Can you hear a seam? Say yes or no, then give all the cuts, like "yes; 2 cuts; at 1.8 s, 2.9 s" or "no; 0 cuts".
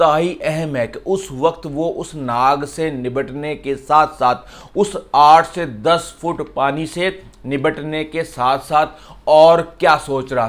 no; 0 cuts